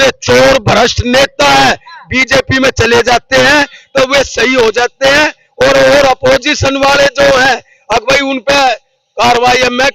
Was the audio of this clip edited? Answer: no; 0 cuts

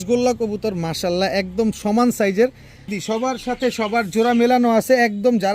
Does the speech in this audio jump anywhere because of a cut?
yes; 1 cut; at 2.9 s

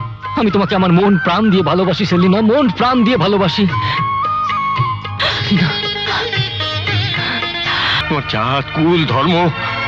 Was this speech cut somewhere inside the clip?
yes; 1 cut; at 8.0 s

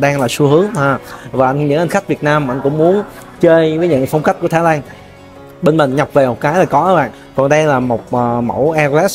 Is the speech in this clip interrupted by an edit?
yes; 1 cut; at 7.2 s

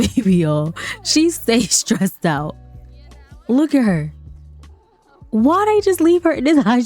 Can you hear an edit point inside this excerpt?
no; 0 cuts

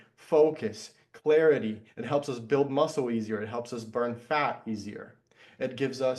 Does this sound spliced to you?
no; 0 cuts

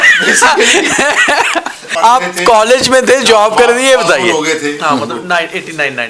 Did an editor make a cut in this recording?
yes; 1 cut; at 1.9 s

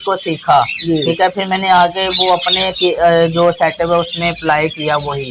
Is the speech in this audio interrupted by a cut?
no; 0 cuts

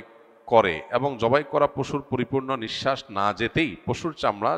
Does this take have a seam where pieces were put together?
no; 0 cuts

